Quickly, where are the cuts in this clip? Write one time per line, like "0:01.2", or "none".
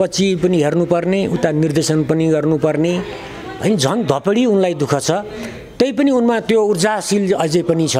none